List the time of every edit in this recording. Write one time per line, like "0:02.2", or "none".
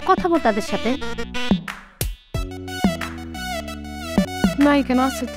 0:04.3